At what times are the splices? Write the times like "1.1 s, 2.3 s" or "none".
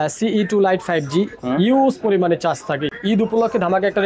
2.9 s